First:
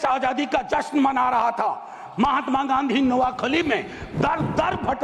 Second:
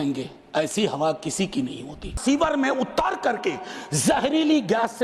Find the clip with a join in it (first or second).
second